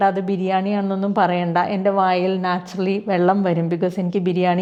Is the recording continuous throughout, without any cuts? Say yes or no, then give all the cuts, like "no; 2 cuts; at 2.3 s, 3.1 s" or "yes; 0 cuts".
yes; 0 cuts